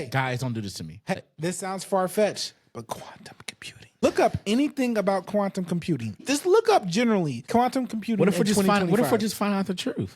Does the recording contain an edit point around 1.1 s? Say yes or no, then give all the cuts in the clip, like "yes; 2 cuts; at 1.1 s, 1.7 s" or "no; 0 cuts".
yes; 4 cuts; at 1.1 s, 4.0 s, 6.2 s, 7.4 s